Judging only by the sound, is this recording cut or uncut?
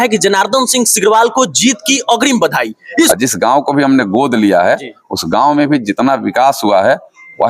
cut